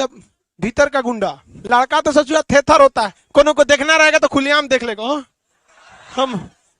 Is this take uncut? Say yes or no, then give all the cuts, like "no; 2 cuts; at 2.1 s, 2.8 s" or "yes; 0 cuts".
no; 1 cut; at 1.5 s